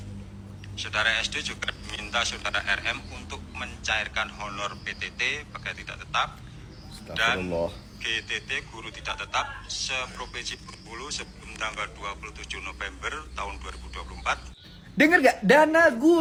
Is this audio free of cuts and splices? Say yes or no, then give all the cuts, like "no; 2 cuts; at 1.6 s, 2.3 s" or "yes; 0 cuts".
yes; 0 cuts